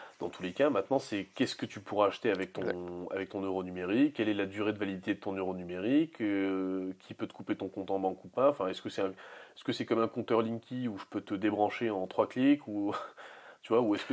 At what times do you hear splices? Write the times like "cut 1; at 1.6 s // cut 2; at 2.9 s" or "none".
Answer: none